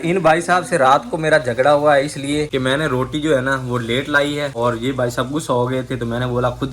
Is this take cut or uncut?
uncut